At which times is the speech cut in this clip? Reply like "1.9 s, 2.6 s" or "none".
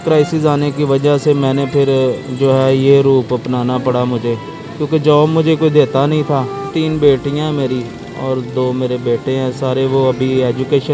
6.7 s